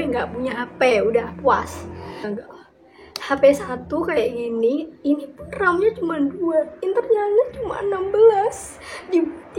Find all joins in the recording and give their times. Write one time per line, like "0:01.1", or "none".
0:02.3

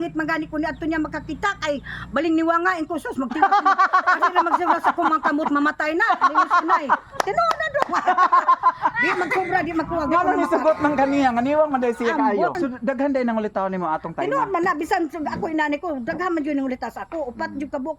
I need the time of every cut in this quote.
0:12.5

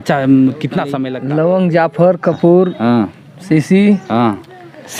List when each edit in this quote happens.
0:01.0

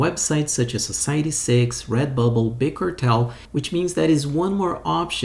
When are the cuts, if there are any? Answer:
0:03.4

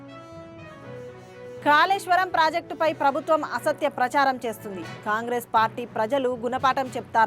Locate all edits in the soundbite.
0:01.0

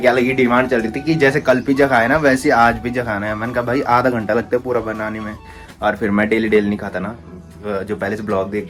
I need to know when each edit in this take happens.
none

